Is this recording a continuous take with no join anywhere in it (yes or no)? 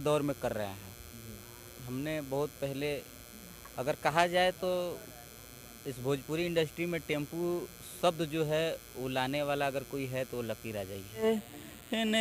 no